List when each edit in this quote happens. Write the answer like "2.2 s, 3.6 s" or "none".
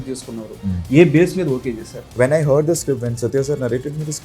2.1 s

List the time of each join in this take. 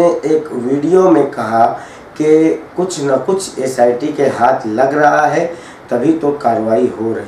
none

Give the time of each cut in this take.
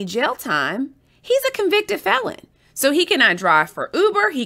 none

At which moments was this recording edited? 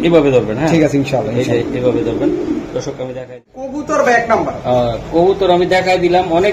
3.4 s

